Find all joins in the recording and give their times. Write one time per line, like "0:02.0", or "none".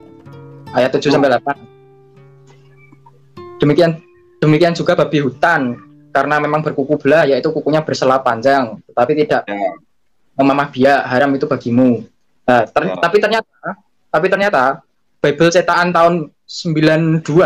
none